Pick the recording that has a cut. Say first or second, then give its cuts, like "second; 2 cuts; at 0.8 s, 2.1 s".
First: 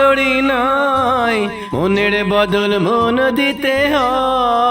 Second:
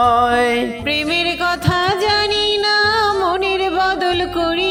first; 1 cut; at 1.6 s